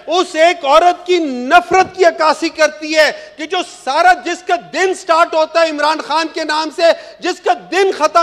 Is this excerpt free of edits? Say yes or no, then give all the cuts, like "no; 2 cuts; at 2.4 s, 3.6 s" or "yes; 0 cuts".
yes; 0 cuts